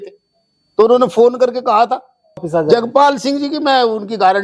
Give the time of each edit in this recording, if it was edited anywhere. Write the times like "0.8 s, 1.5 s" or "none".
2.5 s